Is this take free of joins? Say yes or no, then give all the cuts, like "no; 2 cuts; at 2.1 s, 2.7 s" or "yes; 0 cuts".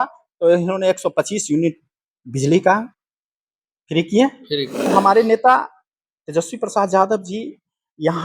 no; 1 cut; at 4.8 s